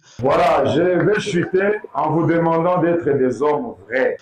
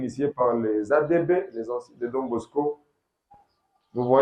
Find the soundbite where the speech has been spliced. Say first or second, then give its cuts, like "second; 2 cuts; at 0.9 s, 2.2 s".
first; 1 cut; at 1.9 s